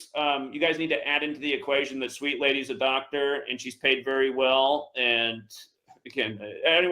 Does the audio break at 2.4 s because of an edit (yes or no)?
no